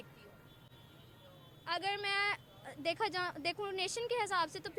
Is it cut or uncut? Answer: uncut